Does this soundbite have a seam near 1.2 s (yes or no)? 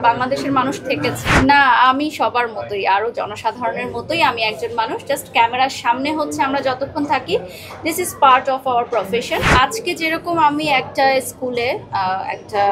yes